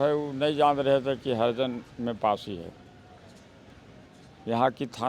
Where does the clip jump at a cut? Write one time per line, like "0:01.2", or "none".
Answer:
none